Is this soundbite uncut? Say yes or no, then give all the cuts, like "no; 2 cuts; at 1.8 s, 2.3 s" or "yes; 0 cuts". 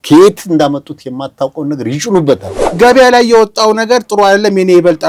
no; 1 cut; at 2.8 s